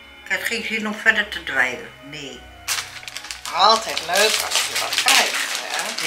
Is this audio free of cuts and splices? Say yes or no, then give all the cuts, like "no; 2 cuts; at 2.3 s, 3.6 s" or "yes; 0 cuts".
no; 1 cut; at 2.6 s